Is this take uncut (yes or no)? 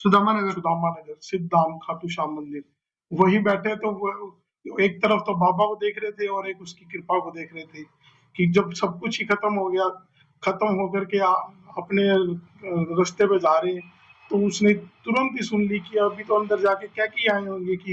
yes